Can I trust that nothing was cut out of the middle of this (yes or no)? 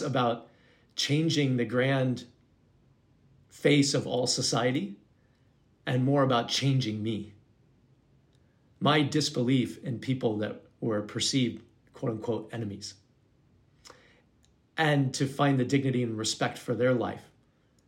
yes